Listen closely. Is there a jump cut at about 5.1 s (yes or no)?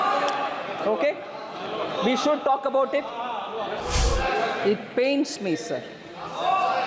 no